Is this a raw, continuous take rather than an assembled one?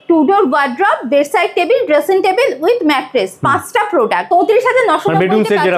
no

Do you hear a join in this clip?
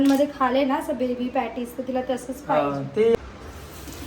yes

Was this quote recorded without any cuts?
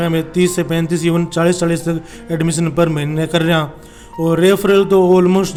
yes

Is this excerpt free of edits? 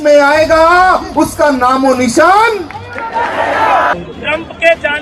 no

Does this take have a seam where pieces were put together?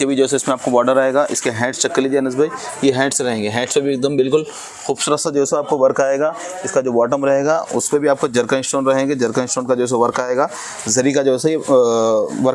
no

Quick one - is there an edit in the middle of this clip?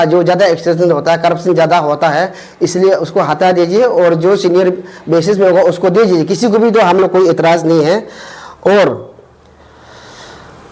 no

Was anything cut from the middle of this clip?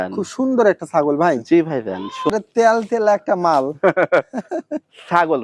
yes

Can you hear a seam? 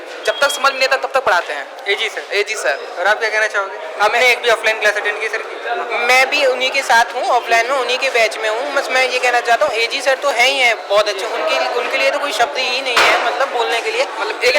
no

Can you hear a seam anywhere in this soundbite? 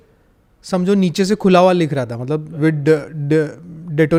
no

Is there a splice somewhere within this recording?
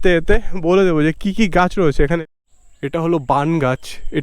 yes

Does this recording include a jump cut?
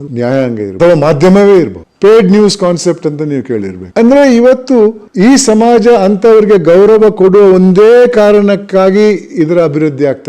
no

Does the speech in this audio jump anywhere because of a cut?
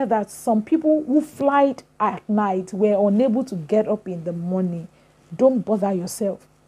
no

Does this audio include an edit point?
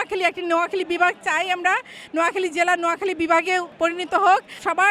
no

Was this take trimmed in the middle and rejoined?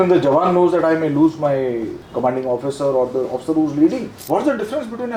yes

